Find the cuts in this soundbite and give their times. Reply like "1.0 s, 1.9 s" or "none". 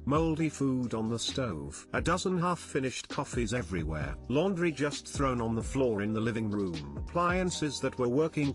7.0 s